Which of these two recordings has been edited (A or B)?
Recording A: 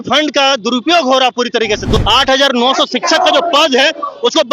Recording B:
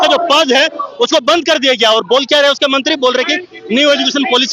A